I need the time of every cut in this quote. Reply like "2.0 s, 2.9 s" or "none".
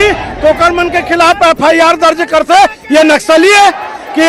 none